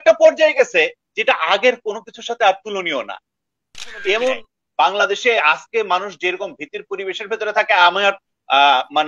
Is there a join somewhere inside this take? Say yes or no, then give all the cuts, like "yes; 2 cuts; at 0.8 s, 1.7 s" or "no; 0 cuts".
yes; 1 cut; at 4.6 s